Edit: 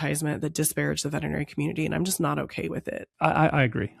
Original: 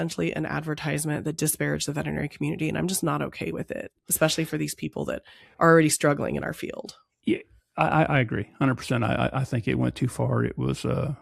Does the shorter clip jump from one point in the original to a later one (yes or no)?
yes